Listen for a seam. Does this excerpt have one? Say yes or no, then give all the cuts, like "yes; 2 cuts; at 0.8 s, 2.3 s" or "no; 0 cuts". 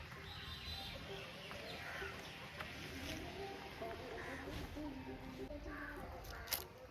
yes; 1 cut; at 5.5 s